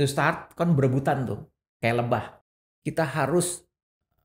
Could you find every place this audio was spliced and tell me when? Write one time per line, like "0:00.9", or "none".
0:02.4